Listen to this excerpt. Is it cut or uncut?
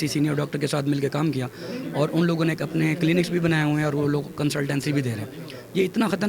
uncut